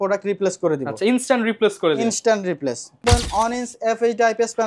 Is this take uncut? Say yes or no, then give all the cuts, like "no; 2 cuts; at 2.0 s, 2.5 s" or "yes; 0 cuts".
no; 1 cut; at 3.0 s